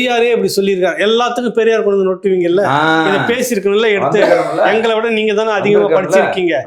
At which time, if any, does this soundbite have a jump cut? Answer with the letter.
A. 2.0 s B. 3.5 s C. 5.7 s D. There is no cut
D